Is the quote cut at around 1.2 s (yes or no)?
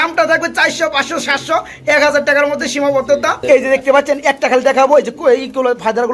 no